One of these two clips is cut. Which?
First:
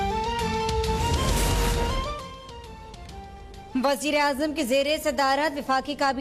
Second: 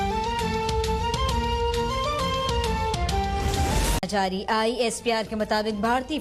first; 1 cut; at 0.9 s

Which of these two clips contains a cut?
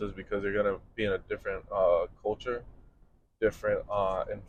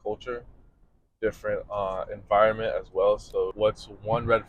second; 1 cut; at 3.5 s

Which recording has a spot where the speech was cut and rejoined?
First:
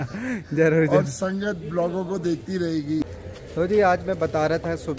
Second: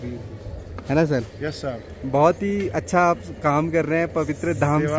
first; 1 cut; at 3.0 s

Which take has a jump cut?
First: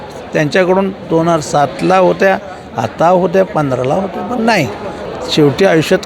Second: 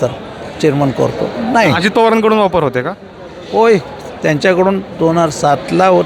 first; 1 cut; at 5.0 s

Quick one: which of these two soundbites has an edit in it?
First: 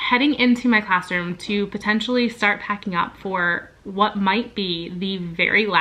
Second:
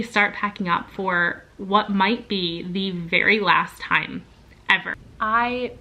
second; 1 cut; at 4.9 s

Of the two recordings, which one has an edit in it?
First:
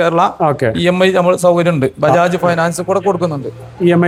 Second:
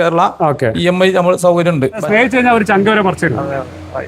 second; 1 cut; at 2.0 s

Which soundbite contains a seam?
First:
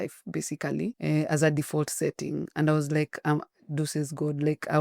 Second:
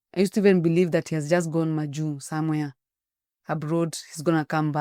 first; 1 cut; at 1.0 s

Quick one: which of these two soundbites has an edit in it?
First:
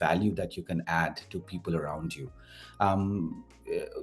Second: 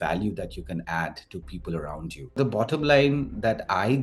second; 1 cut; at 2.4 s

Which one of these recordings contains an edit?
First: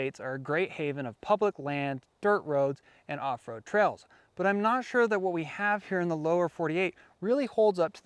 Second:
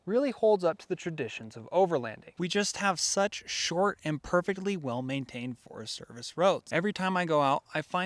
second; 2 cuts; at 2.2 s, 6.6 s

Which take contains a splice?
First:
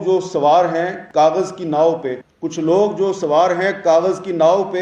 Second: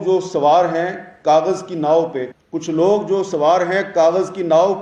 first; 1 cut; at 1.0 s

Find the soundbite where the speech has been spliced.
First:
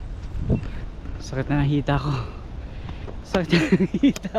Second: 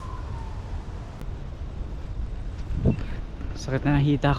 second; 1 cut; at 1.2 s

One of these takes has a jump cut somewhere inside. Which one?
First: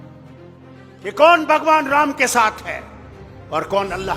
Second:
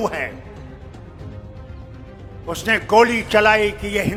first; 1 cut; at 0.9 s

